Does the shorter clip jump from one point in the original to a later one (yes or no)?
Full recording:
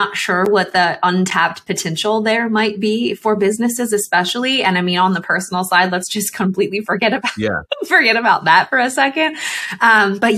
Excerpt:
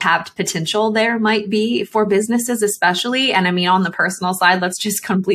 no